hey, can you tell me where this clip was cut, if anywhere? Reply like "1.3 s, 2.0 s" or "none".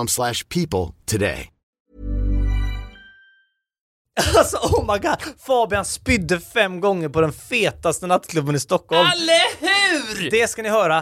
3.9 s